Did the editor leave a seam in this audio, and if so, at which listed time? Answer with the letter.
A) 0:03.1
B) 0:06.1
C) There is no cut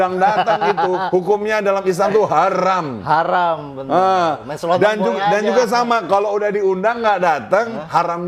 C